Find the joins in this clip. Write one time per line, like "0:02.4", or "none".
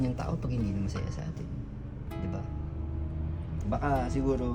0:03.6